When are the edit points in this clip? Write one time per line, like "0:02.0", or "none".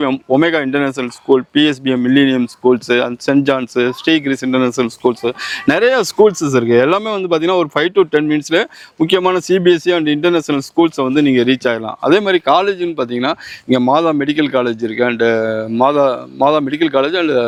none